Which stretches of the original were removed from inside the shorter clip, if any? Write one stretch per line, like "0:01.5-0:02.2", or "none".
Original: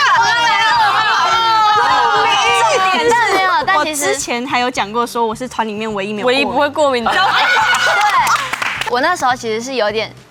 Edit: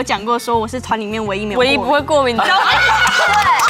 none